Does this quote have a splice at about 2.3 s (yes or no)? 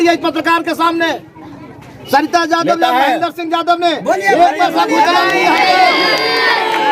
no